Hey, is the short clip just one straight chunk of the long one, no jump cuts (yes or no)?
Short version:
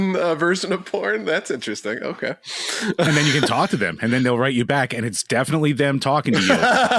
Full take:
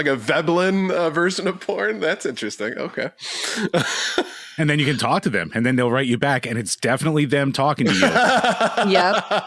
no